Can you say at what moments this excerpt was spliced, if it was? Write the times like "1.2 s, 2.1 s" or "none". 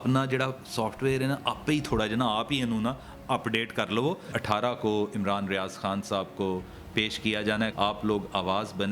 4.3 s, 7.7 s